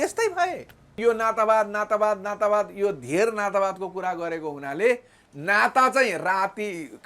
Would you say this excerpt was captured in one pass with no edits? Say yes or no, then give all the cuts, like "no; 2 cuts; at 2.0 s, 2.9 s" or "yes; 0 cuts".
no; 1 cut; at 1.0 s